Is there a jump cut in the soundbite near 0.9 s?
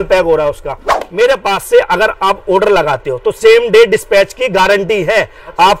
yes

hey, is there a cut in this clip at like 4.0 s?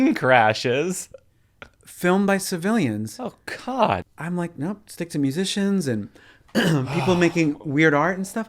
yes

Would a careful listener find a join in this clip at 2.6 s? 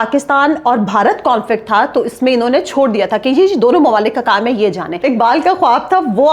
no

